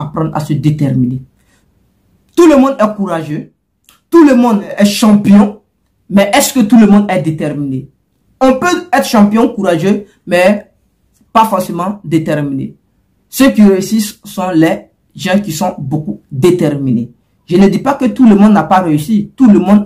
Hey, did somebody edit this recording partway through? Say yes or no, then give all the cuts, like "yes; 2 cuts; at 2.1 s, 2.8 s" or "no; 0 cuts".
yes; 1 cut; at 4.7 s